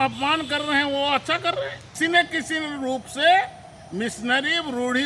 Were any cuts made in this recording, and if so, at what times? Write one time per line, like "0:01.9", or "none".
0:01.5